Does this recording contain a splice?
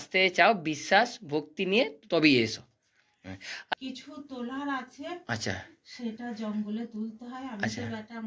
yes; 1 cut; at 3.7 s

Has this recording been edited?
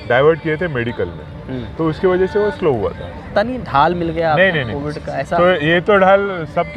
yes; 1 cut; at 3.3 s

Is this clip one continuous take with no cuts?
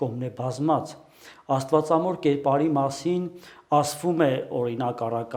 yes; 0 cuts

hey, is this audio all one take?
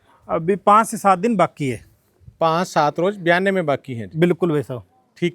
yes; 0 cuts

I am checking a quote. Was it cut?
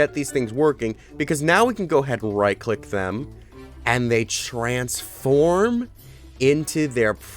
no; 0 cuts

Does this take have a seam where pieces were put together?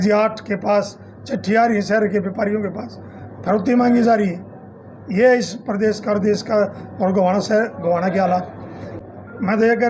yes; 1 cut; at 8.8 s

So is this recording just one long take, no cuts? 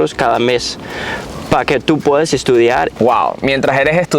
no; 1 cut; at 2.9 s

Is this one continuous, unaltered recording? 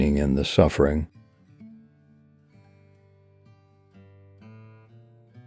no; 1 cut; at 1.1 s

